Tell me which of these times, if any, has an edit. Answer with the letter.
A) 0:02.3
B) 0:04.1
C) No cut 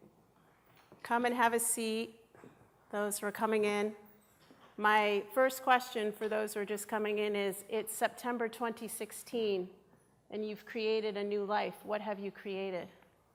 C